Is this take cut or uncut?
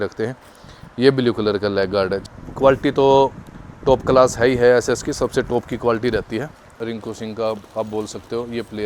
cut